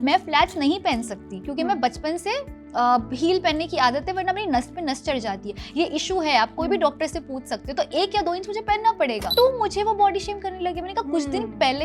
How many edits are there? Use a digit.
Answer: 1